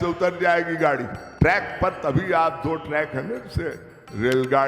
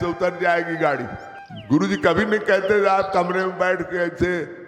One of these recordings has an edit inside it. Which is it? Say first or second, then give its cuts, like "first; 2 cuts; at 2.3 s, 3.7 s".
second; 1 cut; at 1.2 s